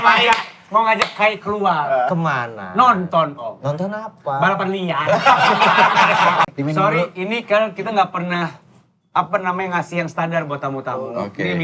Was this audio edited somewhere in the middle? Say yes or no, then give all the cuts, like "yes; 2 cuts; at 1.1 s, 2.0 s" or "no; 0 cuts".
yes; 1 cut; at 6.5 s